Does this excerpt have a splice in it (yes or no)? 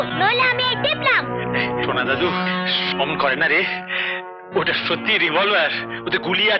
no